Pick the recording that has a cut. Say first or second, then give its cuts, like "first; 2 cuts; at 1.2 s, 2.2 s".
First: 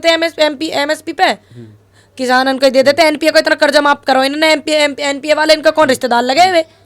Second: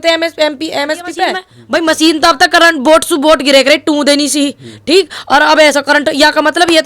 second; 1 cut; at 1.5 s